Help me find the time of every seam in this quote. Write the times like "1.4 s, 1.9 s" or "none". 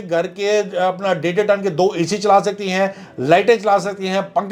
none